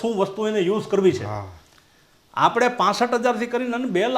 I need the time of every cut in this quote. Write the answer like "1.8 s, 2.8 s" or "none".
none